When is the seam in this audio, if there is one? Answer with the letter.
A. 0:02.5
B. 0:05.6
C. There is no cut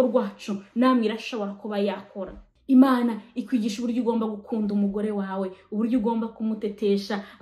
A